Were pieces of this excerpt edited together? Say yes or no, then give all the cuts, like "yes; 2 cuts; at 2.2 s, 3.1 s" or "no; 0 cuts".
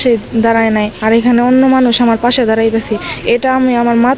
no; 0 cuts